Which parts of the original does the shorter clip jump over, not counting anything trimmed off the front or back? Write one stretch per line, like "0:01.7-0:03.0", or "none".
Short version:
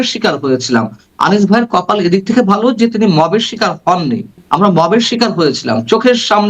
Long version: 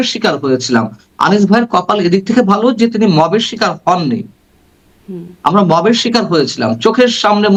0:04.3-0:05.3